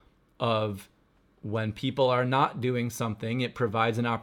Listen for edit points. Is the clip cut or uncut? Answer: uncut